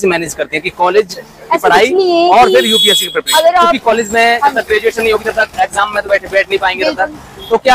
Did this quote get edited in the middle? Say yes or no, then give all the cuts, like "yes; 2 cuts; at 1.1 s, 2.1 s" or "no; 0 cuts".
yes; 1 cut; at 3.8 s